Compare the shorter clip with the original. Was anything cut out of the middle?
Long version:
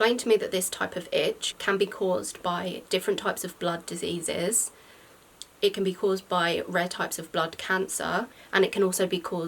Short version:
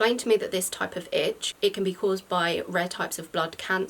yes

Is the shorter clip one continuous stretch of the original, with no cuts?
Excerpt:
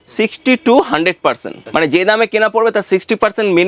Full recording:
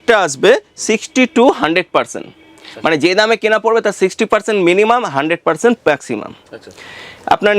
no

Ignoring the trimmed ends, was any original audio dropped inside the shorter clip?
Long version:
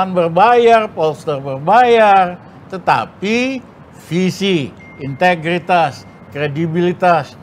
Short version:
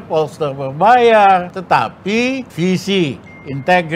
yes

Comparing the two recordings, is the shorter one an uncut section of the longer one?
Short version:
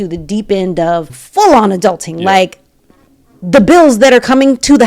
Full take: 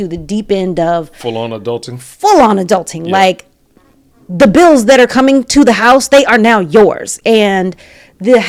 no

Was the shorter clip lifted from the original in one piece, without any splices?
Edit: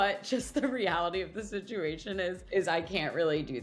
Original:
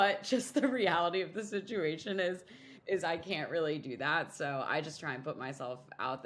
no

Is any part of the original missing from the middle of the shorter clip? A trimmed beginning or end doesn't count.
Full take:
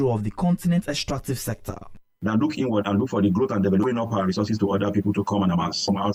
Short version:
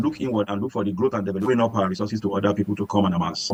no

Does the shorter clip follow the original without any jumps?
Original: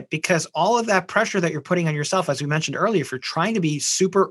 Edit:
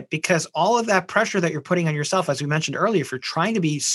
yes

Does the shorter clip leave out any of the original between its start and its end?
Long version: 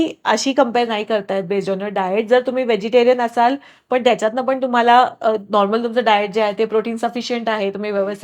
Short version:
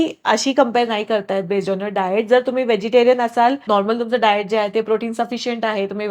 yes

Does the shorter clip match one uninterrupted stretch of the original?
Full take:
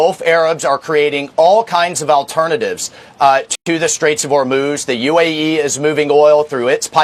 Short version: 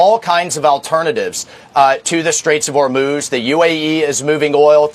no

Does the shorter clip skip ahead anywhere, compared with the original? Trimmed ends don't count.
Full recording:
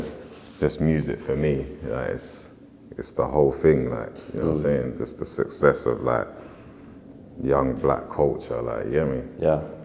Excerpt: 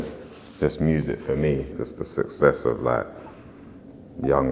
yes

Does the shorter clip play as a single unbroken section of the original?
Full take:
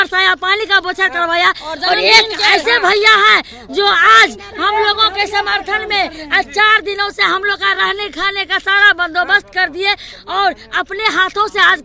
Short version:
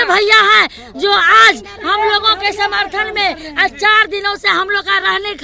yes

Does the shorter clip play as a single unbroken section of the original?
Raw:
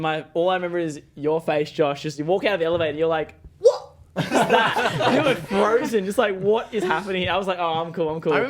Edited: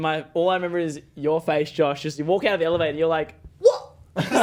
yes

